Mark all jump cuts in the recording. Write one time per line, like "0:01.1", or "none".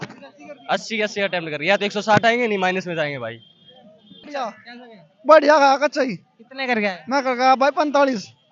0:04.1